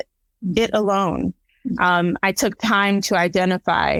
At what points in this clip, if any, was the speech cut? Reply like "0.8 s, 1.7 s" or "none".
none